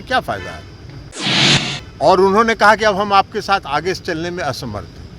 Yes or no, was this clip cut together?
yes